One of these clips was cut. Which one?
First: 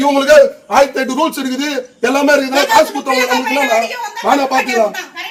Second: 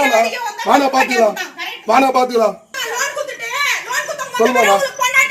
second; 1 cut; at 2.8 s

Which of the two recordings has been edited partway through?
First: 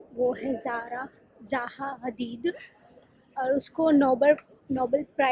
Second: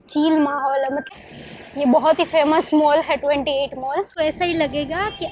second; 2 cuts; at 1.1 s, 4.1 s

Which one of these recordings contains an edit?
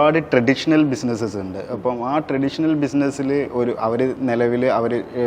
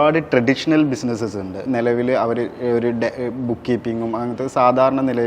second; 1 cut; at 1.6 s

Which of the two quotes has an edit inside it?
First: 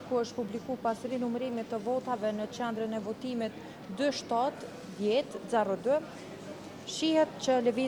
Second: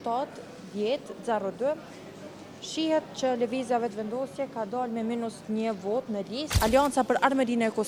second; 1 cut; at 6.4 s

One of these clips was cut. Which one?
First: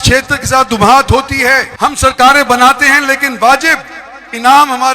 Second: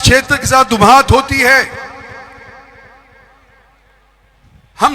first; 1 cut; at 1.7 s

